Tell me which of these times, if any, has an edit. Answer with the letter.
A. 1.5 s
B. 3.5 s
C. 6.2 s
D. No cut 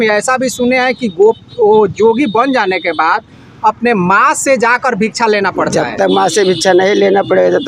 D